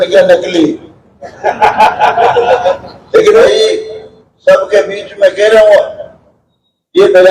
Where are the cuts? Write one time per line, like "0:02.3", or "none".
0:03.4